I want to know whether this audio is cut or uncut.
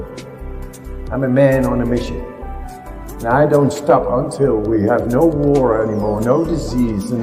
uncut